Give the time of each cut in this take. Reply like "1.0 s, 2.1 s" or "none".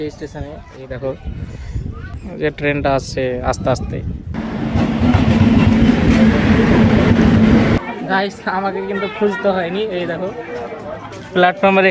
2.1 s, 4.4 s, 7.8 s